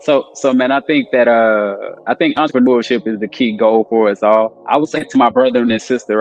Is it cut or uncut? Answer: cut